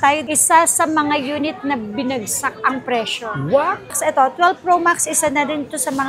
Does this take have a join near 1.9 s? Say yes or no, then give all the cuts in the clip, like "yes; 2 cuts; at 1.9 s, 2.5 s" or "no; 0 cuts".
no; 1 cut; at 3.8 s